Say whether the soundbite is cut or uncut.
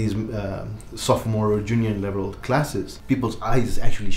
cut